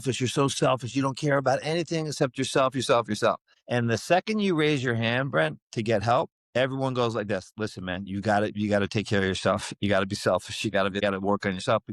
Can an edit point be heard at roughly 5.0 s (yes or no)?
no